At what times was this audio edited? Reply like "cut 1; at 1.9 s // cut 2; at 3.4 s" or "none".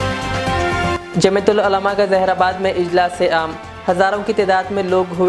none